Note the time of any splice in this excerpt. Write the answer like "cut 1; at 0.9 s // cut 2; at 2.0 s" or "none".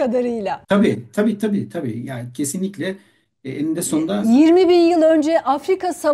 none